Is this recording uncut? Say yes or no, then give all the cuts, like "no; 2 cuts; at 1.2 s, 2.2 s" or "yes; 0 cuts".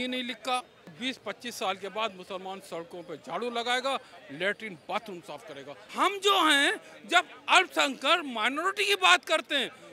no; 2 cuts; at 0.9 s, 5.8 s